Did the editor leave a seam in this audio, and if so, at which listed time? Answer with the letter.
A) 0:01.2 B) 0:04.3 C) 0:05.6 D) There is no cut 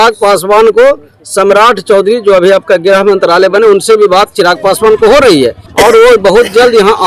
C